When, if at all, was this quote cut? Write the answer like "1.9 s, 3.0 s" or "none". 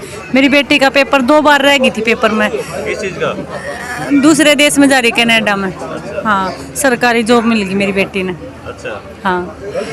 none